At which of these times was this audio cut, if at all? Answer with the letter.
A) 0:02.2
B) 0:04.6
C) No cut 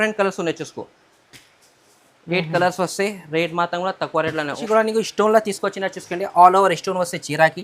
B